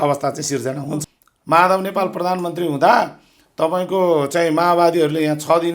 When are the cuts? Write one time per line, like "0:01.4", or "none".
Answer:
0:01.0